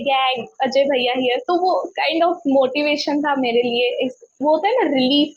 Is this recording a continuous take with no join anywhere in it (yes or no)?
yes